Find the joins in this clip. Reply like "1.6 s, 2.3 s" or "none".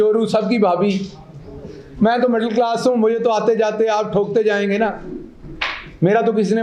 none